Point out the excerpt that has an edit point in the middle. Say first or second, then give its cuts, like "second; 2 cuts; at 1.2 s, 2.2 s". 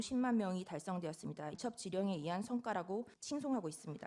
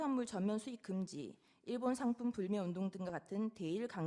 first; 2 cuts; at 1.6 s, 3.2 s